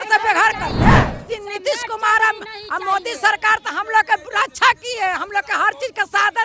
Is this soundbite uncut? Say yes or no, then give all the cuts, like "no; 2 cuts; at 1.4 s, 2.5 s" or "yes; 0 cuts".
no; 1 cut; at 1.2 s